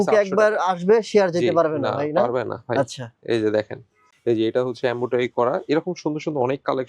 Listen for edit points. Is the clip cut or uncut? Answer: cut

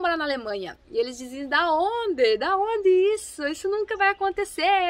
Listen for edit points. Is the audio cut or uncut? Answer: uncut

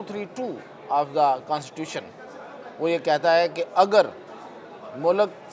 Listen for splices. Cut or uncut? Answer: uncut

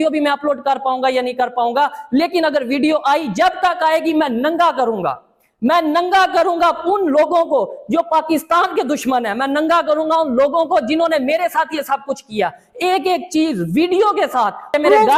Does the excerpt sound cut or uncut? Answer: uncut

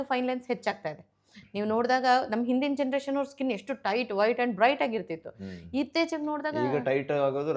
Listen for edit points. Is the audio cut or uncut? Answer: uncut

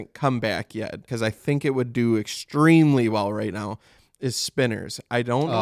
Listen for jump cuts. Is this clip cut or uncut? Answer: cut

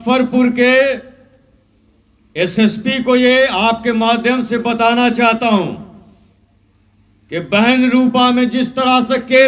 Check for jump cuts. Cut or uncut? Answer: uncut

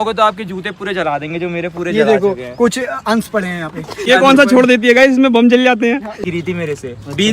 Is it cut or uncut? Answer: cut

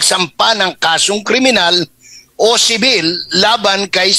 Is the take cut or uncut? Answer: uncut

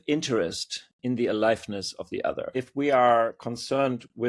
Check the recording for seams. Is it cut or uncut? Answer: cut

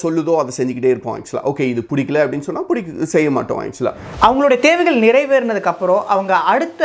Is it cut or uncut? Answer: cut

